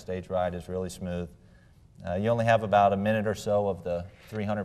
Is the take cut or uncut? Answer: uncut